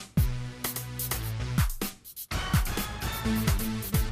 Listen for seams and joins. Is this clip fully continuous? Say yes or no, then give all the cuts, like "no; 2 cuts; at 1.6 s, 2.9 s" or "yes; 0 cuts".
no; 1 cut; at 2.1 s